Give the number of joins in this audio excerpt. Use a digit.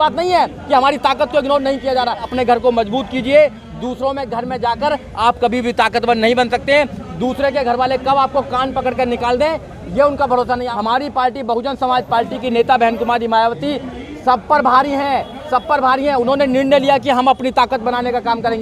2